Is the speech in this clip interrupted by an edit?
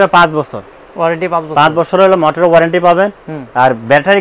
no; 0 cuts

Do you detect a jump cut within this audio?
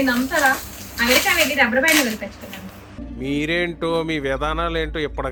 no; 0 cuts

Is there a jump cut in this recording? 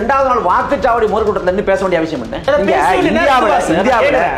yes; 1 cut; at 2.4 s

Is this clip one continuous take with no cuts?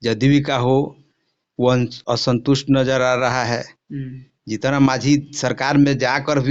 yes; 0 cuts

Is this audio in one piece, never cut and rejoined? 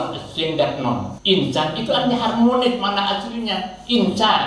no; 1 cut; at 1.1 s

